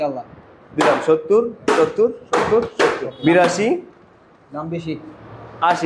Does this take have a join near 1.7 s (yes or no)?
no